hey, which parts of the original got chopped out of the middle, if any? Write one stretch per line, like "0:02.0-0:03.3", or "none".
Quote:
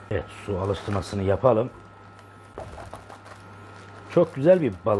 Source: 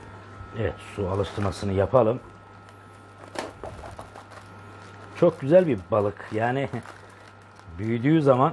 0:03.0-0:03.6